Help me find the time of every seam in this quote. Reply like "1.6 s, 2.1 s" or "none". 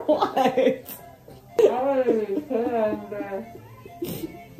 1.6 s